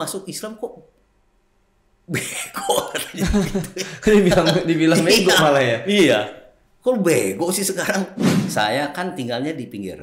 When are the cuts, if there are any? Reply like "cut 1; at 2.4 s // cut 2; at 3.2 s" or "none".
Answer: cut 1; at 8.4 s